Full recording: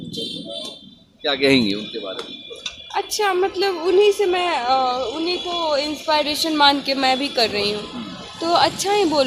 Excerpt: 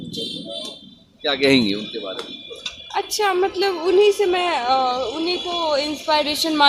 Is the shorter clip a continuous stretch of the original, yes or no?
yes